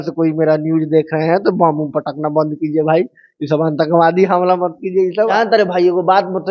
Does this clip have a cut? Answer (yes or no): yes